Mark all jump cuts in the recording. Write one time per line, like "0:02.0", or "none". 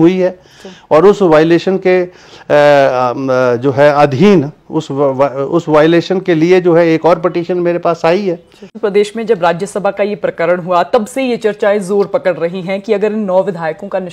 0:08.7